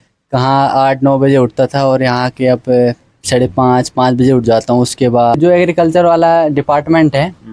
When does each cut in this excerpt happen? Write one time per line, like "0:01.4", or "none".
0:05.4